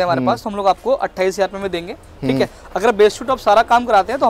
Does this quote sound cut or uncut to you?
uncut